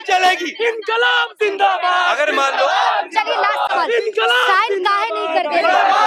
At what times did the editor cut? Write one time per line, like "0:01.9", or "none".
none